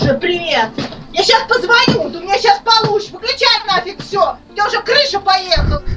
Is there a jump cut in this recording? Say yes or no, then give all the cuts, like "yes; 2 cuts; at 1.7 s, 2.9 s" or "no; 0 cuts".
no; 0 cuts